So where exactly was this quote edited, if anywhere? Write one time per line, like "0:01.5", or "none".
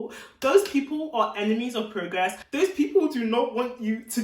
0:02.4